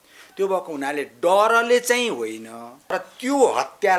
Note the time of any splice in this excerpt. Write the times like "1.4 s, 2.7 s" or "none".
2.9 s